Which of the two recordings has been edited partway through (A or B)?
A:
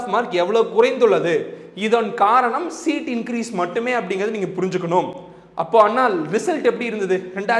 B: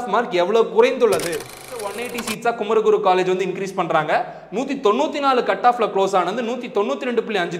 B